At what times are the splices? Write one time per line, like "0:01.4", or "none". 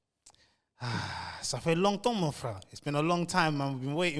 none